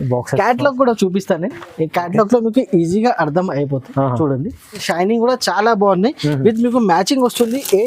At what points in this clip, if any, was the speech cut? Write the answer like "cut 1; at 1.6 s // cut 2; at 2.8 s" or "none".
cut 1; at 4.8 s